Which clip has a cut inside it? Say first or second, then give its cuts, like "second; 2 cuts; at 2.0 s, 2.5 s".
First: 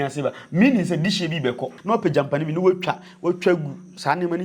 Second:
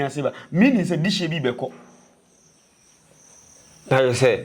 first; 1 cut; at 1.7 s